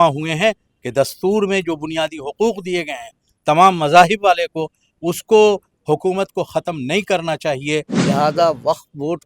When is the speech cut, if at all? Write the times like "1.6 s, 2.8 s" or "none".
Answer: 7.9 s